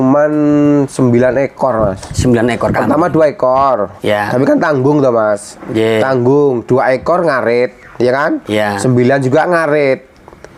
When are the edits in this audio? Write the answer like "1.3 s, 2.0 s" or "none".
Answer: none